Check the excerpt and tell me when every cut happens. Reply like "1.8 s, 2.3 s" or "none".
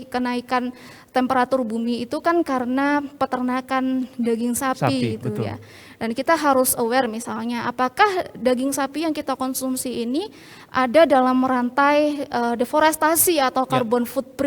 none

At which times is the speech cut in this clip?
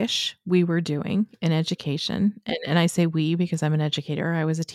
none

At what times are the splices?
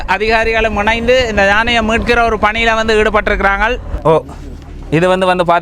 4.0 s

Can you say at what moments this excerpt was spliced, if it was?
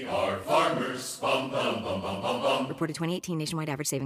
2.7 s

